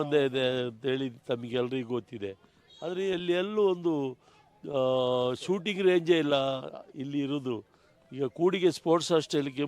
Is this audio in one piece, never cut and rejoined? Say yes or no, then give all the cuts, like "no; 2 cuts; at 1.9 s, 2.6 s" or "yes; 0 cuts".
yes; 0 cuts